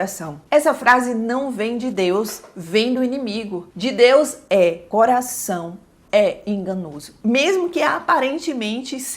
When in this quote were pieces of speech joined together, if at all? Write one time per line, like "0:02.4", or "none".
0:07.1